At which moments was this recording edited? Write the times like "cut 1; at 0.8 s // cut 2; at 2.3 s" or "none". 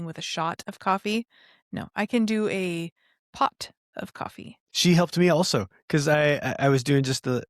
cut 1; at 4.6 s